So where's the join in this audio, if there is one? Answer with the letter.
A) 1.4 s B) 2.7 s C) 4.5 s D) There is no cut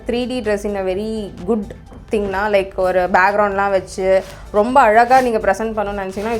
D